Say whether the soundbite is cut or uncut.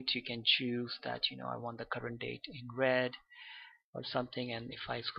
cut